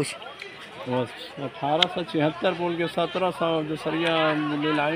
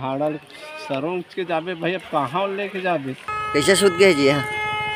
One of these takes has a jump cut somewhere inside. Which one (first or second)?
second